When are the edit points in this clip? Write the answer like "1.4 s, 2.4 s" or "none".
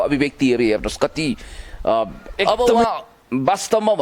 2.5 s